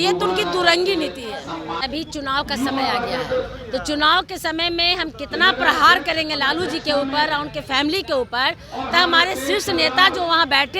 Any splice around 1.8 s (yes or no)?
yes